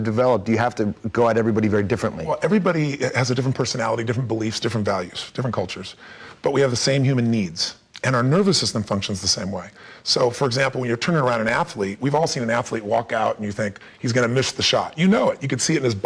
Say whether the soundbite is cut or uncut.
uncut